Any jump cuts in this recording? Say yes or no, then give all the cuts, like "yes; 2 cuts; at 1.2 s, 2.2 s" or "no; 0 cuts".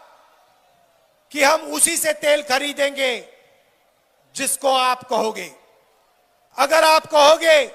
no; 0 cuts